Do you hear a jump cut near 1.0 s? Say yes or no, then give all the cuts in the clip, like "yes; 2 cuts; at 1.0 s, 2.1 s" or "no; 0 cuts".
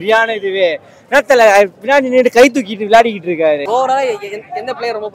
no; 1 cut; at 3.6 s